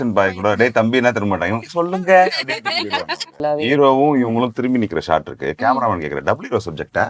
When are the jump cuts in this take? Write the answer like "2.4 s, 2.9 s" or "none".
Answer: 3.3 s